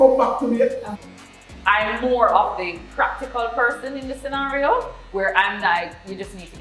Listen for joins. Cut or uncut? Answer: cut